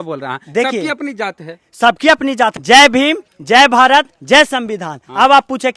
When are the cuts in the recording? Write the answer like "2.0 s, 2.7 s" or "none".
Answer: 2.5 s